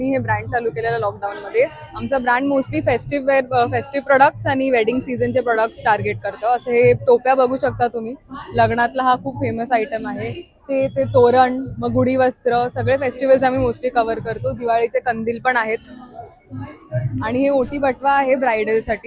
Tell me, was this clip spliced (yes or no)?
no